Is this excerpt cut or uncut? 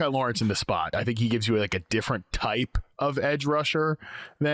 cut